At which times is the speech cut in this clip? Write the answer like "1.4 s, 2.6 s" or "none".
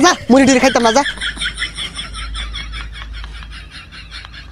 1.1 s